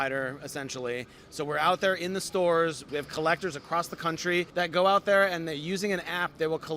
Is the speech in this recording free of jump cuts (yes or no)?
no